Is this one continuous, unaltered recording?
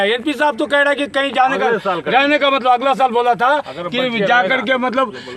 yes; 0 cuts

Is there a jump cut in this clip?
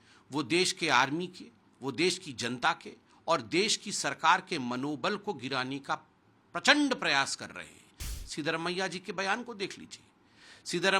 yes; 1 cut; at 8.0 s

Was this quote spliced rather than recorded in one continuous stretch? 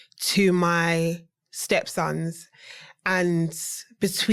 no; 0 cuts

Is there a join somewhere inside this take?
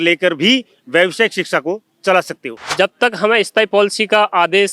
yes; 1 cut; at 2.7 s

